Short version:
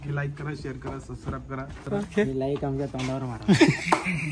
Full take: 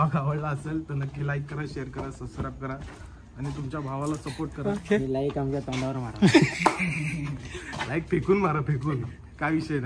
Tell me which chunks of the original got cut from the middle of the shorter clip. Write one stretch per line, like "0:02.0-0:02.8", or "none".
0:02.9-0:04.6